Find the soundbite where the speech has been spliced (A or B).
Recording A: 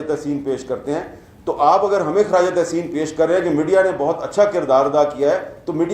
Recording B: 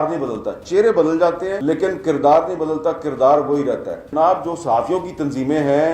B